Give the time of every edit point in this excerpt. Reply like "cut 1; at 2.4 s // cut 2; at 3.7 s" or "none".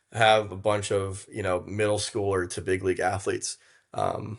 none